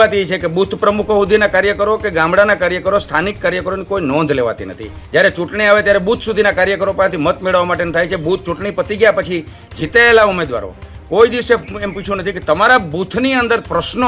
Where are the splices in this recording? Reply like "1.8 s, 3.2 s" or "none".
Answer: 5.0 s